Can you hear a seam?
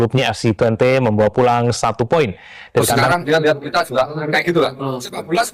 yes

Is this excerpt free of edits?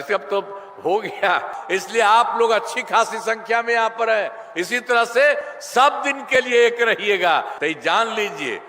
no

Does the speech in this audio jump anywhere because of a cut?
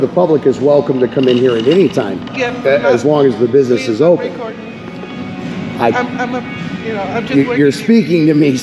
no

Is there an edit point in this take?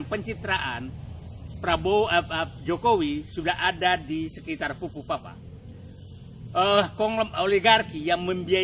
no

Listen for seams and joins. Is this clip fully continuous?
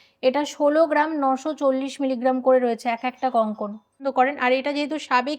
no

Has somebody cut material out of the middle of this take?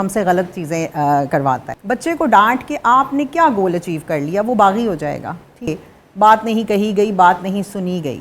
yes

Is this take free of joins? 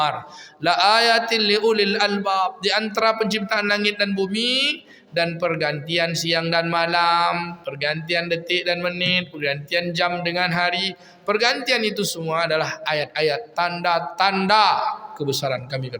yes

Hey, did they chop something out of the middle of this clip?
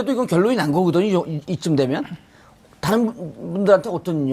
yes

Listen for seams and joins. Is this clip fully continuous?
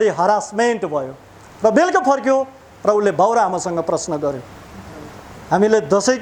yes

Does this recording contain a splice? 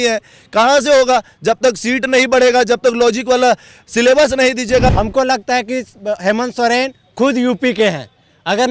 yes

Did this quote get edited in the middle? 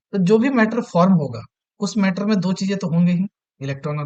no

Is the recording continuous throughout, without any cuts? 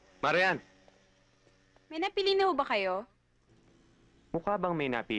no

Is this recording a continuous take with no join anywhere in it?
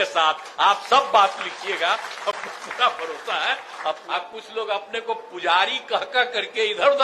no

